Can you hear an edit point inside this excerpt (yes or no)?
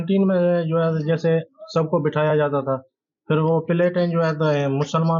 no